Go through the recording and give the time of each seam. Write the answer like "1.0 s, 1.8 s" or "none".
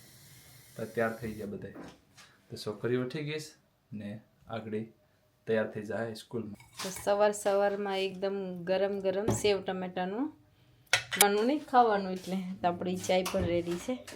6.6 s, 11.1 s

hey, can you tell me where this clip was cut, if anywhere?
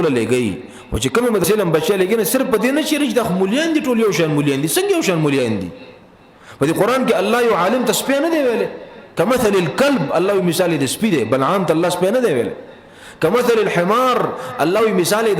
1.4 s

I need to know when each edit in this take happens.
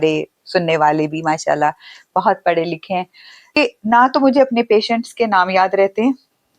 3.6 s

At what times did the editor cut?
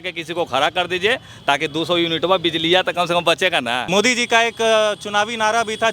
3.8 s

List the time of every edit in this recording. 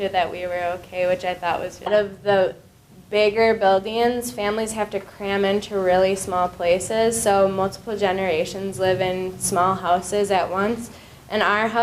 none

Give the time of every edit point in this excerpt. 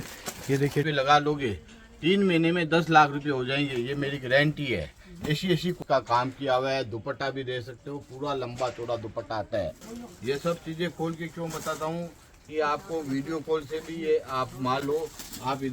0.8 s, 5.8 s, 9.9 s

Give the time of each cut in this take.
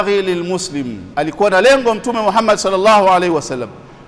1.0 s

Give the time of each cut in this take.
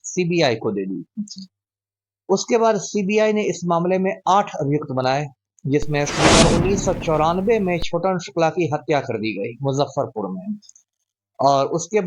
6.3 s

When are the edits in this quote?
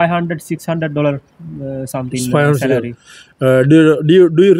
none

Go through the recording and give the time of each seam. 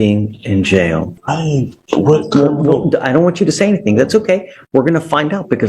1.1 s

